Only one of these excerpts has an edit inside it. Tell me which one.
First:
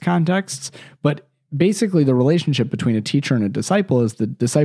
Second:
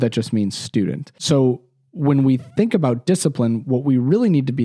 second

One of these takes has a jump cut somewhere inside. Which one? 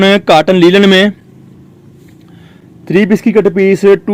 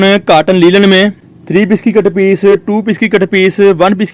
second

